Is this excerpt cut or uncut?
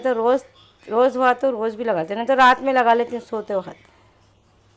uncut